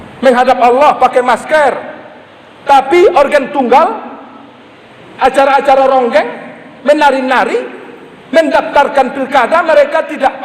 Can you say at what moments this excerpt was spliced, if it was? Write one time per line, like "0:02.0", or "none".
none